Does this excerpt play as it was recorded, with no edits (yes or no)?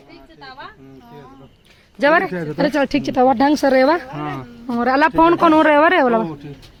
yes